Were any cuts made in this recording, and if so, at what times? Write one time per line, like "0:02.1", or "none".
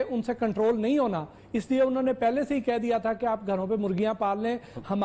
none

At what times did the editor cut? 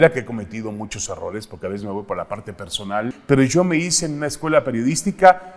0:03.2

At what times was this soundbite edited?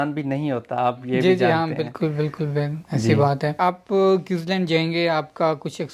0:03.6

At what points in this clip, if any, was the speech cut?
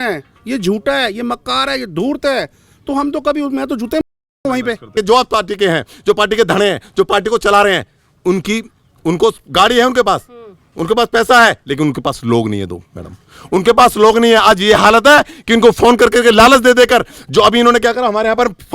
0:04.9

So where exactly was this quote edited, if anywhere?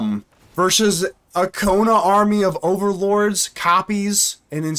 none

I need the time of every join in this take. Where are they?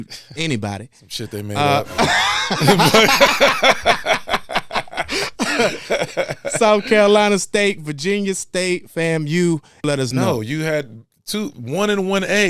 0:09.7

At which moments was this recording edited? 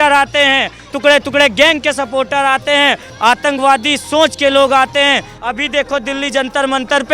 0:03.1
0:05.3

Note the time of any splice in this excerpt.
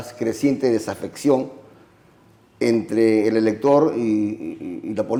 none

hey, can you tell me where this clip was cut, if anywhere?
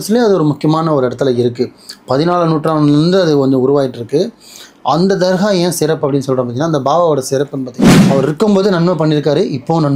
0:07.8

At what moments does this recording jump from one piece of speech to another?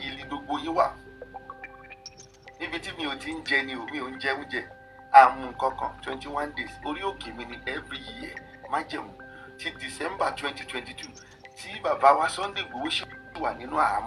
0:01.0
0:02.6

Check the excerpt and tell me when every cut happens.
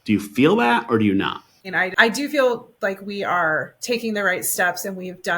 0:01.7

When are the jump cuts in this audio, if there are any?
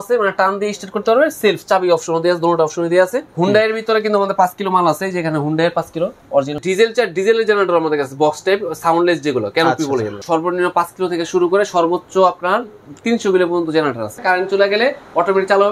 0:03.2
0:06.6
0:10.2
0:14.2

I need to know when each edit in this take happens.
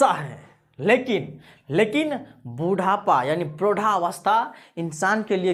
none

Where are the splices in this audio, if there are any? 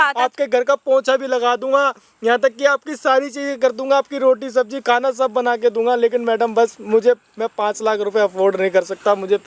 none

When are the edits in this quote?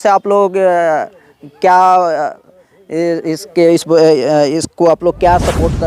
none

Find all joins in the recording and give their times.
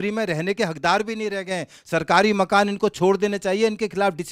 none

